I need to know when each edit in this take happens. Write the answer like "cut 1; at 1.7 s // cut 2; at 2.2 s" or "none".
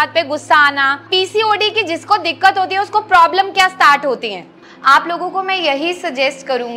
cut 1; at 1.1 s // cut 2; at 4.7 s